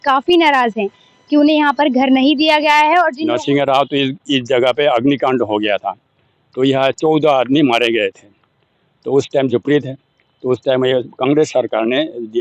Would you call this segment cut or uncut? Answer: cut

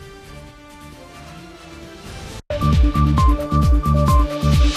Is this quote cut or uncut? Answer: uncut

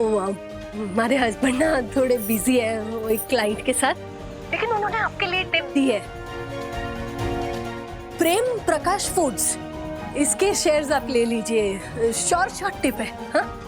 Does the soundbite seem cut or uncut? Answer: uncut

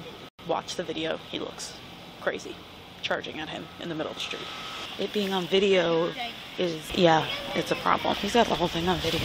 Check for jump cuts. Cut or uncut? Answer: cut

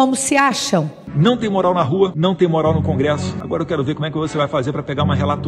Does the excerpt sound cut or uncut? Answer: uncut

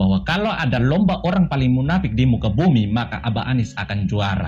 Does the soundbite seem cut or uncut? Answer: uncut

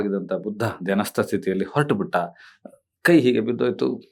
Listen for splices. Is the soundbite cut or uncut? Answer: uncut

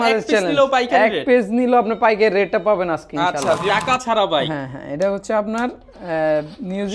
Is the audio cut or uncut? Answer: cut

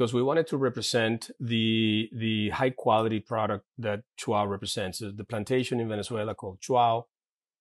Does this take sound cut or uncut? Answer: uncut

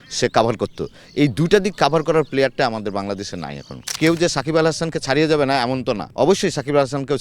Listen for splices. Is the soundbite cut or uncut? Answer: cut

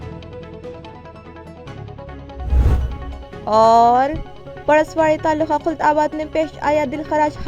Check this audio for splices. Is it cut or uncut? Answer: uncut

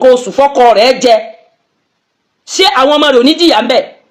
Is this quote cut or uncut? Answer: uncut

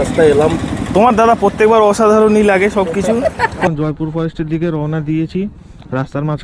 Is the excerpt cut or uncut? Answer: cut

